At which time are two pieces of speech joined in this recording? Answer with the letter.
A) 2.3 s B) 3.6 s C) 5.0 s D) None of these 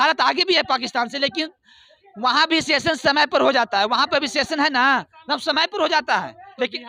D